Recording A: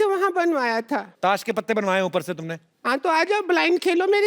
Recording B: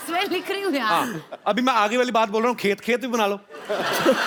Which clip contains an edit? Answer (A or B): A